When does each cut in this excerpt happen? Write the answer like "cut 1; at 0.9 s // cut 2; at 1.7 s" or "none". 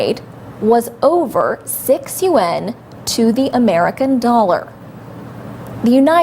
cut 1; at 4.0 s